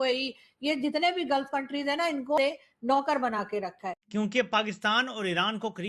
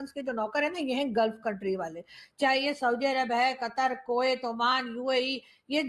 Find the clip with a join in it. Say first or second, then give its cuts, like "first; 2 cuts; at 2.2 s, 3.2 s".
first; 2 cuts; at 2.4 s, 4.1 s